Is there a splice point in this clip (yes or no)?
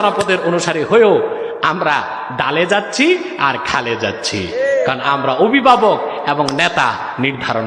no